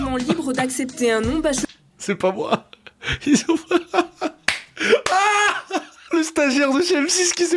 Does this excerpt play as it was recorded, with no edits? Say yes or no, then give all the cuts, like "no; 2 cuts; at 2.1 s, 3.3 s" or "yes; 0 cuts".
yes; 0 cuts